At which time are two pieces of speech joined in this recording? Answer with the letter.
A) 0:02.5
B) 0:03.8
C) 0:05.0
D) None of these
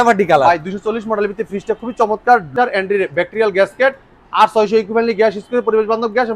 A